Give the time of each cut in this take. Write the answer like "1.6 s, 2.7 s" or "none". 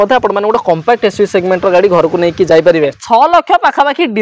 3.0 s